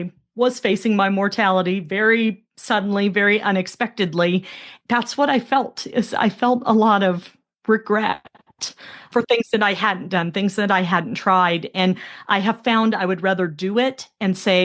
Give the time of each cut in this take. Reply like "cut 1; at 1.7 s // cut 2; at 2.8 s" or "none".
cut 1; at 4.6 s // cut 2; at 9.0 s